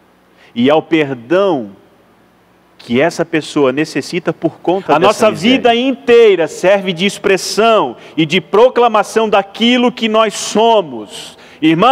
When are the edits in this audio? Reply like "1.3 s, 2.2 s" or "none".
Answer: 4.9 s